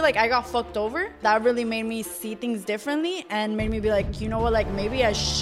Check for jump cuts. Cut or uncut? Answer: cut